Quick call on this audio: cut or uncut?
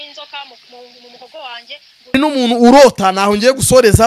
cut